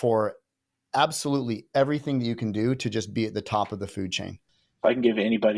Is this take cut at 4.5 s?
yes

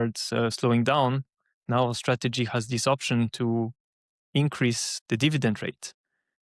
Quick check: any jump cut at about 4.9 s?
yes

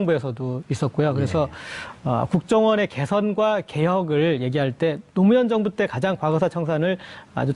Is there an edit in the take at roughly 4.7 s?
no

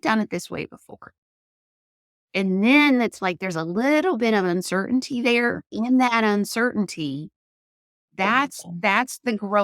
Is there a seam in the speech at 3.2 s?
no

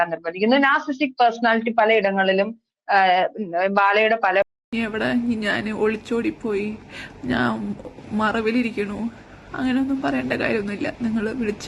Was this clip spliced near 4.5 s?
yes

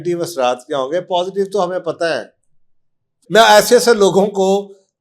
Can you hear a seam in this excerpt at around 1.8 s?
no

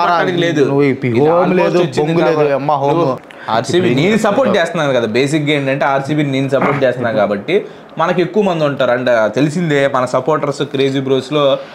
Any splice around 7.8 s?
no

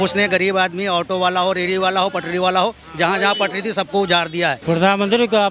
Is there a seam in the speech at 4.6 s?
yes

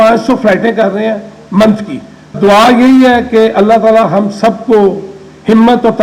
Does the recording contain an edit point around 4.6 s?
no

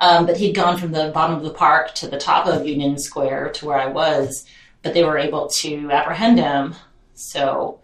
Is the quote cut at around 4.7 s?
yes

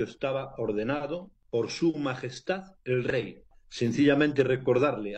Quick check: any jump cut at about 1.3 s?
yes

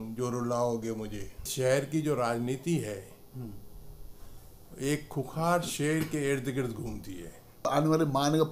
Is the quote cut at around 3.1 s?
no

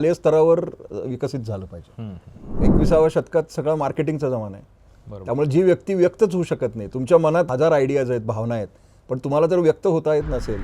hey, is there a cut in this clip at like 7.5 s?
yes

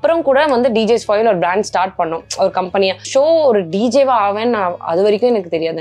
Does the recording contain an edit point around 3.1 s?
yes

